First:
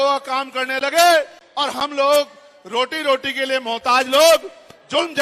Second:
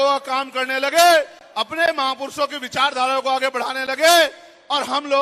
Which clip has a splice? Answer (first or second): first